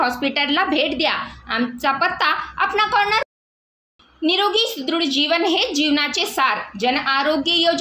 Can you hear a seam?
yes; 1 cut; at 3.3 s

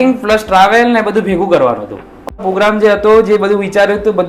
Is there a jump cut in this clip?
yes; 1 cut; at 2.4 s

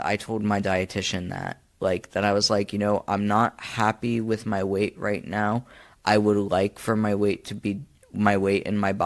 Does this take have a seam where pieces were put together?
no; 0 cuts

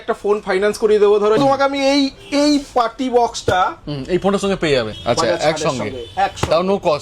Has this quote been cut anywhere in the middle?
yes; 2 cuts; at 1.4 s, 4.9 s

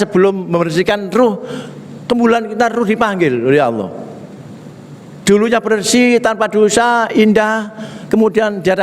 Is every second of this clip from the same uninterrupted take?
yes; 0 cuts

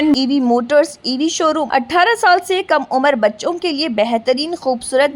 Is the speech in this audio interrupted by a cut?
yes; 1 cut; at 1.6 s

